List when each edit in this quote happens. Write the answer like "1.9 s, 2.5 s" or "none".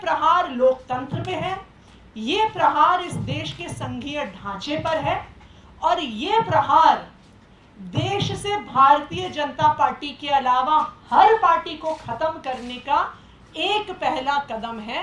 none